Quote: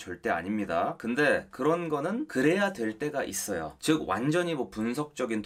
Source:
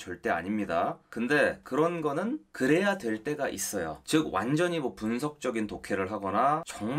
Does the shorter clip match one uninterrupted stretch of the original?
no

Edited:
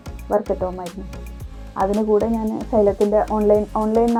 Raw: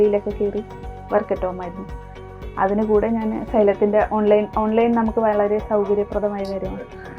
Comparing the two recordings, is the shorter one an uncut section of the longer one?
yes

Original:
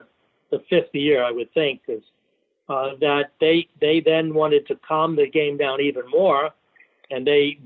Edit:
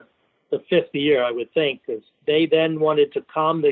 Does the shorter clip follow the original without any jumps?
no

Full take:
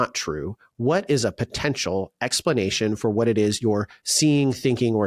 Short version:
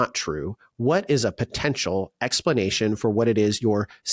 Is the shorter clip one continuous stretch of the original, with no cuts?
yes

